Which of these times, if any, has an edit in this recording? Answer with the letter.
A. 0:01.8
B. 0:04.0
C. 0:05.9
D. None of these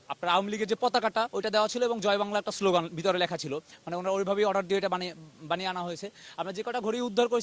D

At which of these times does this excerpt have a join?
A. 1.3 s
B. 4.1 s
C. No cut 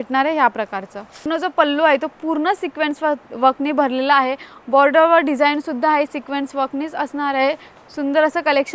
A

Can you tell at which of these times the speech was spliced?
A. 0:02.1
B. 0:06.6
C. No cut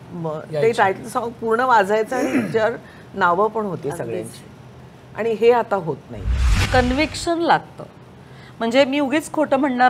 B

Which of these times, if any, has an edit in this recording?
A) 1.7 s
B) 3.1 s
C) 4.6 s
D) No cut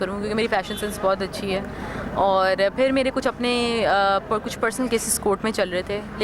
D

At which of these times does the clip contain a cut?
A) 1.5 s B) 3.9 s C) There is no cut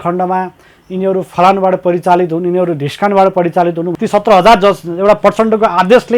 B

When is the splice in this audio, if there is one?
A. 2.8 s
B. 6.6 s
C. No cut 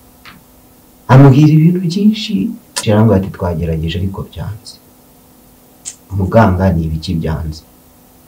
A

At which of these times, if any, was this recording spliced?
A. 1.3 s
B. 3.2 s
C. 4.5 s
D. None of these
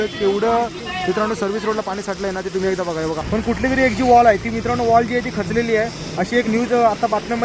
B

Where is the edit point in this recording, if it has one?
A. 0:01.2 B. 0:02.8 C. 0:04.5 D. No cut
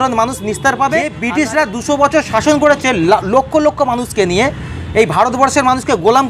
A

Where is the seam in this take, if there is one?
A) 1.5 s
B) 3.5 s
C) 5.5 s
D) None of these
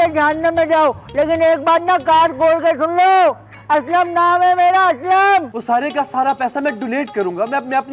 C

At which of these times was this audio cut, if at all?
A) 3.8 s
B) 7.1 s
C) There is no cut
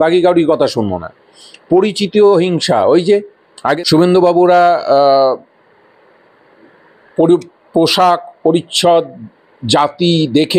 A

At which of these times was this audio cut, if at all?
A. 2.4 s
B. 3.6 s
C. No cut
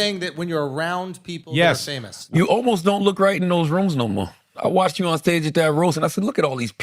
A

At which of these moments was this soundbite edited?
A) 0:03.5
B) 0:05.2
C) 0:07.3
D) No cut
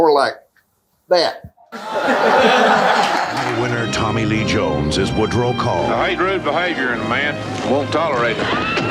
A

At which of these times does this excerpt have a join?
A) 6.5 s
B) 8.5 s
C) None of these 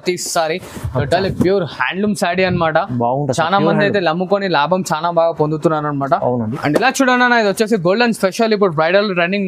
A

